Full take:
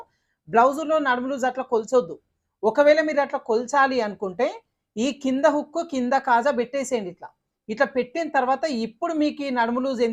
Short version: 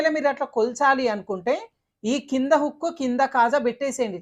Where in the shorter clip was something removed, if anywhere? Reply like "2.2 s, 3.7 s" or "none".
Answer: none